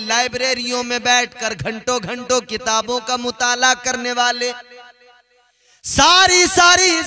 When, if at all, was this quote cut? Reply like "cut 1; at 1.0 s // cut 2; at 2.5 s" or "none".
none